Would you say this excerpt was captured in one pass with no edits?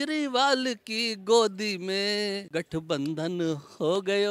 yes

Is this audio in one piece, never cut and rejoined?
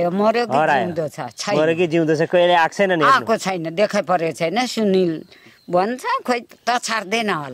no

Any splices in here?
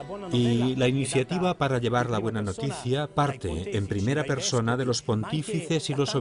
yes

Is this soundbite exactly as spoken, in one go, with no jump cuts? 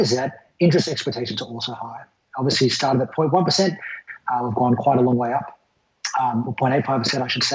no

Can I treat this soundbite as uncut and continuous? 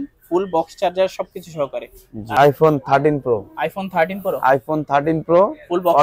no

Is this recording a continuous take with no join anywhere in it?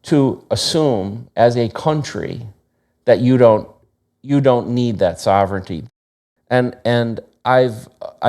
no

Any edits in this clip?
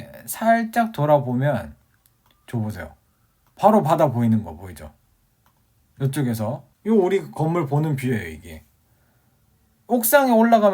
yes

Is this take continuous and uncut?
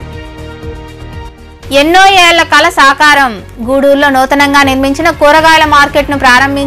no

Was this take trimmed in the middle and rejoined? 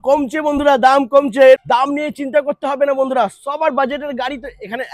yes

